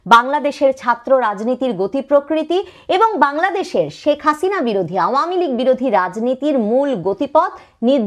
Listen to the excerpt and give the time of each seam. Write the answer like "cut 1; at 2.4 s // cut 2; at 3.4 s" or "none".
none